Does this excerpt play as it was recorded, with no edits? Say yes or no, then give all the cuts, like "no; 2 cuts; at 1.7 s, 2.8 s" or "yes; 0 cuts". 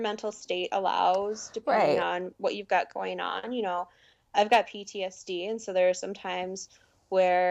yes; 0 cuts